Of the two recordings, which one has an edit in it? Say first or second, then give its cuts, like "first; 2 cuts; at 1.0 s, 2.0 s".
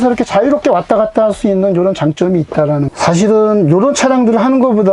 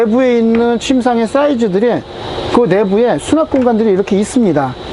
first; 1 cut; at 2.9 s